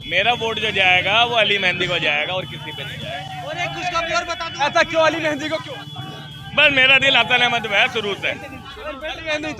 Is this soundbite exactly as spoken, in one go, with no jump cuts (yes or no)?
yes